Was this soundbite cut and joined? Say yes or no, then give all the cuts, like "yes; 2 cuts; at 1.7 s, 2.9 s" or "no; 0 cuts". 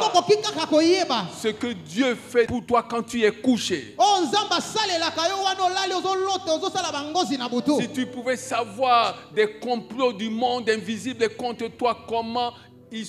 no; 0 cuts